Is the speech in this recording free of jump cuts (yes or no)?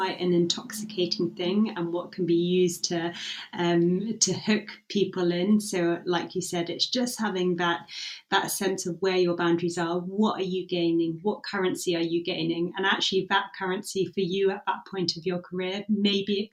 yes